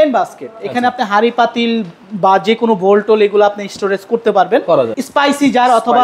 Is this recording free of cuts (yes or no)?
no